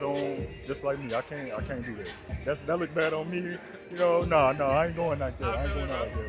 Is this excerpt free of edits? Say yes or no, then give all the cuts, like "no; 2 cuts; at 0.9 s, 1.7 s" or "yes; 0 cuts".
yes; 0 cuts